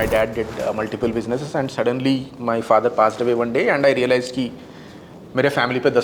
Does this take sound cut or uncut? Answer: uncut